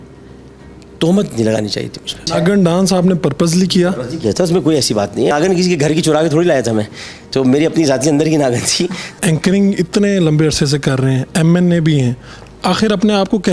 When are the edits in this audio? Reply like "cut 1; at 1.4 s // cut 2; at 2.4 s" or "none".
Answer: cut 1; at 2.2 s // cut 2; at 5.3 s // cut 3; at 9.2 s